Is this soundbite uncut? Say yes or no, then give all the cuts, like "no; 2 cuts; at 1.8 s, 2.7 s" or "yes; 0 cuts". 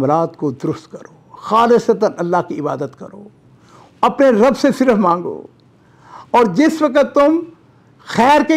yes; 0 cuts